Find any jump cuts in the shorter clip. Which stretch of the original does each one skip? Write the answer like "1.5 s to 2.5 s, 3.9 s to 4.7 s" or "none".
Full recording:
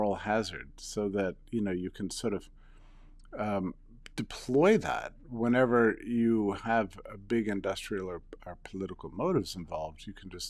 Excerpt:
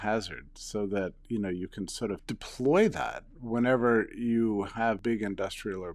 2.5 s to 4.2 s, 6.9 s to 7.3 s